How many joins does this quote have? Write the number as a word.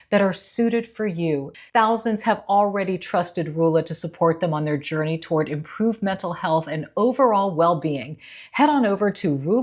one